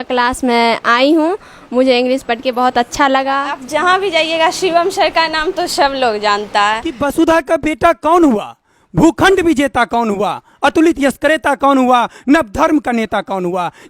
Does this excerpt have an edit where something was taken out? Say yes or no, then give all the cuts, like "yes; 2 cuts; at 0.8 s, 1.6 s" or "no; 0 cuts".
yes; 2 cuts; at 3.6 s, 6.9 s